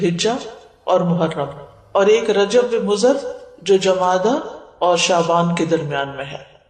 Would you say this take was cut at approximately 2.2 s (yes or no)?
yes